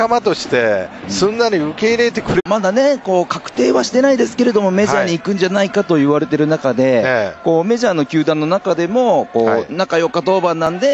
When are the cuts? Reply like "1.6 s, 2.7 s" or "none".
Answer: none